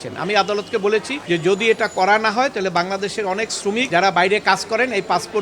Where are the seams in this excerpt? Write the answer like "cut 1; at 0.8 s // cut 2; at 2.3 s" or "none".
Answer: cut 1; at 1.1 s // cut 2; at 3.9 s